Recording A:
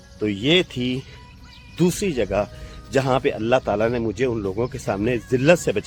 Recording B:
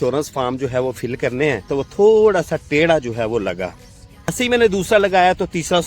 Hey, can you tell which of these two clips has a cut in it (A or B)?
B